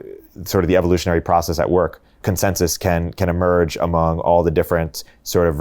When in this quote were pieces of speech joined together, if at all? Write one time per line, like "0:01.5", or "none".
0:02.2